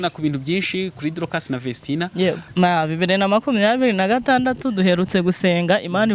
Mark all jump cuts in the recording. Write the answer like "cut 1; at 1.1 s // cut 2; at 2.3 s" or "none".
cut 1; at 2.4 s